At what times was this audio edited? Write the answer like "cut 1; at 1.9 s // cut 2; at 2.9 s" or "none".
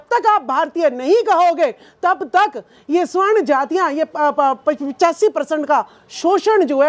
none